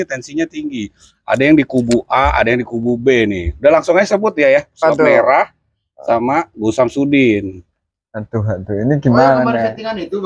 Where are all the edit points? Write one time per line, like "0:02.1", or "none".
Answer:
none